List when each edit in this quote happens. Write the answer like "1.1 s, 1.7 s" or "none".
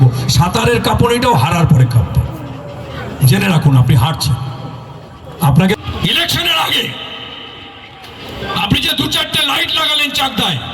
5.7 s